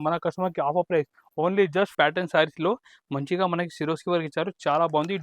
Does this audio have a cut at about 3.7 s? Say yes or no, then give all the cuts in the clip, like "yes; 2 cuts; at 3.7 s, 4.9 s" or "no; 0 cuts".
no; 1 cut; at 1.9 s